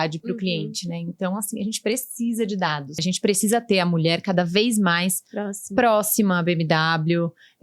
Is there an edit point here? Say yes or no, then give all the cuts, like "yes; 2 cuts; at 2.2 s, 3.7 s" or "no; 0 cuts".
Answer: yes; 1 cut; at 3.0 s